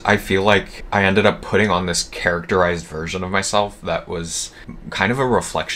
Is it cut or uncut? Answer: uncut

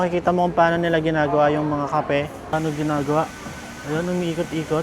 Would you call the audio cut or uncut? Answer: cut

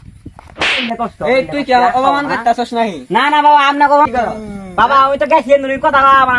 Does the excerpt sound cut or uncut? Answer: cut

